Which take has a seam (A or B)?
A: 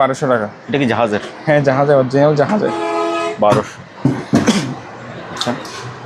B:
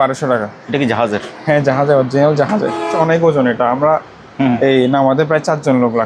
B